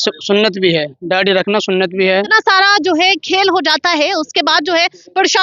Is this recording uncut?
no; 1 cut; at 2.1 s

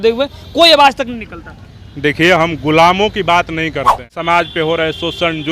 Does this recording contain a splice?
yes; 1 cut; at 4.1 s

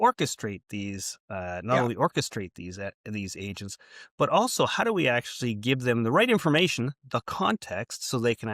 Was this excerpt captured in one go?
yes; 0 cuts

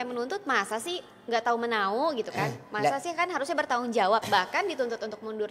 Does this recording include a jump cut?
no; 0 cuts

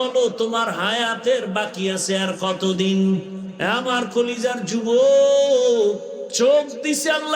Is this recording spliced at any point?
yes; 2 cuts; at 3.4 s, 6.2 s

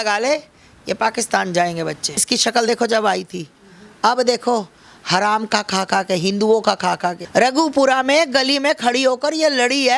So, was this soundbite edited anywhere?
yes; 2 cuts; at 2.2 s, 7.2 s

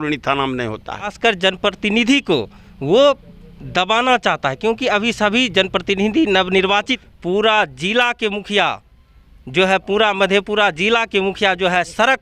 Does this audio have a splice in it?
yes; 2 cuts; at 1.1 s, 7.1 s

